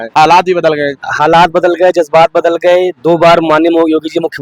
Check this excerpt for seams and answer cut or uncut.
cut